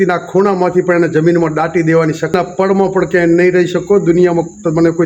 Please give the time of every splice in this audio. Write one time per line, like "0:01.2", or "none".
0:02.3